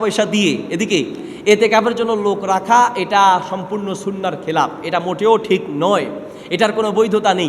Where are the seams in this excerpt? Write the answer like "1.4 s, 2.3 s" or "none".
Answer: none